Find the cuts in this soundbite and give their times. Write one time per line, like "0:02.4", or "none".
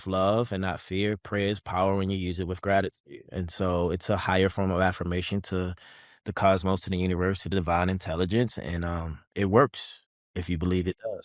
none